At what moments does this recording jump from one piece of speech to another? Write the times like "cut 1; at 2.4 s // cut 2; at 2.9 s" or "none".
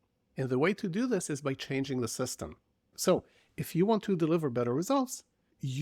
cut 1; at 2.9 s